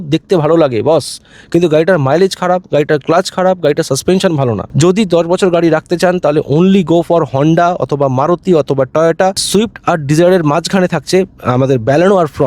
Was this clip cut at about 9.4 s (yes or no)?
yes